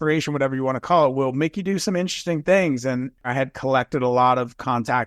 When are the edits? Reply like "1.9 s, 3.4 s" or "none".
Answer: 3.2 s

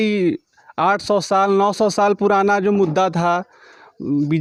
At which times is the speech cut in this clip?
none

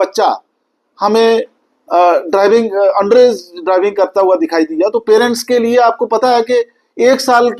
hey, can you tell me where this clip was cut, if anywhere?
none

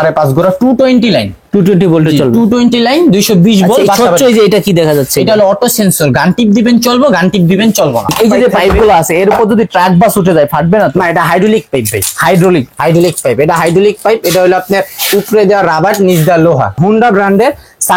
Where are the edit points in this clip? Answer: 8.1 s, 16.8 s

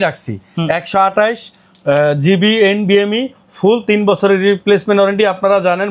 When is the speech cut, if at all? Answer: none

